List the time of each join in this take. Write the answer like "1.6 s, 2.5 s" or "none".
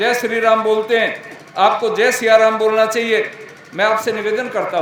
none